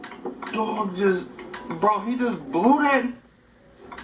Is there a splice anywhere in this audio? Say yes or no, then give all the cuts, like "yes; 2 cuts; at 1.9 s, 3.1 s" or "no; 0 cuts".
no; 0 cuts